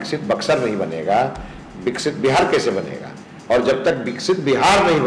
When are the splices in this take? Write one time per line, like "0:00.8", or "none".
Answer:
none